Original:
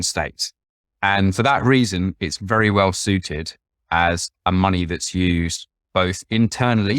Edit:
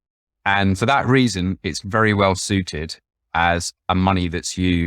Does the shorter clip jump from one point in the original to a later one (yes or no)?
no